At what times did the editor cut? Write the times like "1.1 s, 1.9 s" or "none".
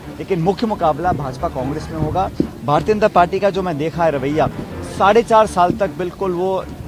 none